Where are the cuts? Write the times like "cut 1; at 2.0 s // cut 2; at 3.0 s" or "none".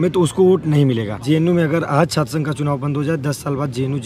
cut 1; at 1.1 s